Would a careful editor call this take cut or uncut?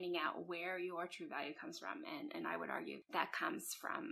cut